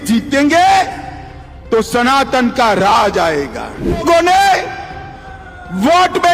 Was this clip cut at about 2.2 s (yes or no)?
no